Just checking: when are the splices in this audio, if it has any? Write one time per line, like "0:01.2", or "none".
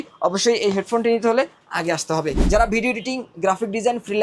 0:02.4